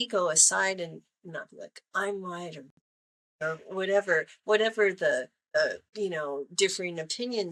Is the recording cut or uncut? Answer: uncut